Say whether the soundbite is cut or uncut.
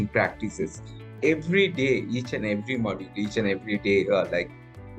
cut